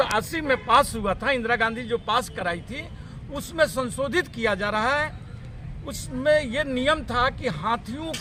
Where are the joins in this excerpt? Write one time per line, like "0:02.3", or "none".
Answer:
none